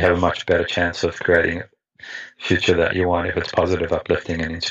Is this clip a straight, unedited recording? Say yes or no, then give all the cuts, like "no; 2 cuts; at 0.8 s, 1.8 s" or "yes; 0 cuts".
yes; 0 cuts